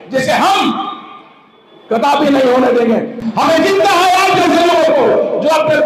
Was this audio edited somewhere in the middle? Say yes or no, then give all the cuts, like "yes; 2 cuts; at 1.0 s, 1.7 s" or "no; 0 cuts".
yes; 1 cut; at 3.1 s